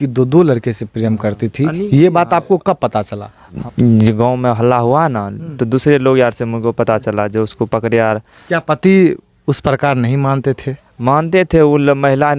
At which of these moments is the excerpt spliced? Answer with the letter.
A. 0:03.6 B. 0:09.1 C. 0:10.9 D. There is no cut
A